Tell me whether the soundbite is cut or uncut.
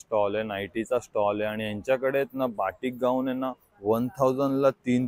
uncut